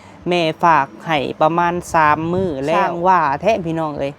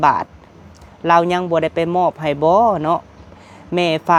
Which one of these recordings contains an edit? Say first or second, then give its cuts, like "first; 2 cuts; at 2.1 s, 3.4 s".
first; 1 cut; at 2.8 s